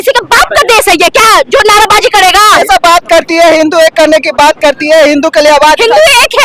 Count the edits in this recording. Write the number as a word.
one